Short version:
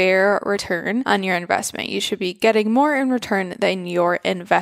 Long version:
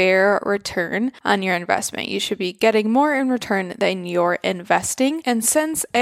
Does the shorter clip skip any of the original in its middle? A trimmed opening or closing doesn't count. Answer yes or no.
yes